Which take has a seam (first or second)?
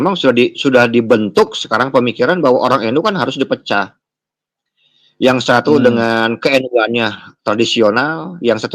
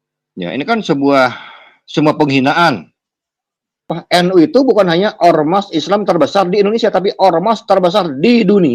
second